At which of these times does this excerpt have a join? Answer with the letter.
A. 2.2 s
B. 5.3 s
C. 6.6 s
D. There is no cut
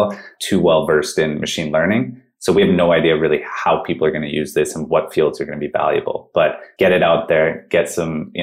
C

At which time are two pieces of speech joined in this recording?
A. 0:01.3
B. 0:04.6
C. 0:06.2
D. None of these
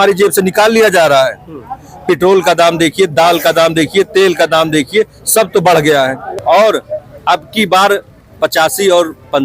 C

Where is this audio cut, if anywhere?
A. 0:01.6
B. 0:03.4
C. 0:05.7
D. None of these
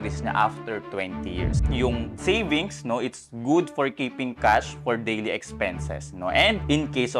A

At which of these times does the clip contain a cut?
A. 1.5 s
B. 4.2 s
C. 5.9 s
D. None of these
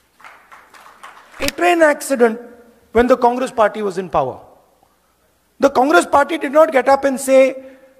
A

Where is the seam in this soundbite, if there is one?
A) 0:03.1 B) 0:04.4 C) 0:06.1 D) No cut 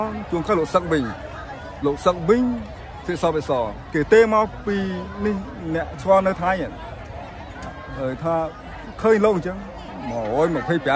D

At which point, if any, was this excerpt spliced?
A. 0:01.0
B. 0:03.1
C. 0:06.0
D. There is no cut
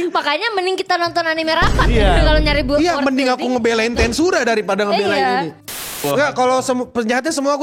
C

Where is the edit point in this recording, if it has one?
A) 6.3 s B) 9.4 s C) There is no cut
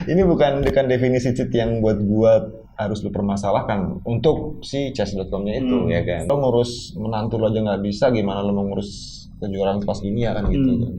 A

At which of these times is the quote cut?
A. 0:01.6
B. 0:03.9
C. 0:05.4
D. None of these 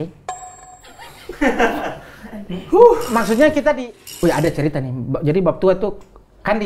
B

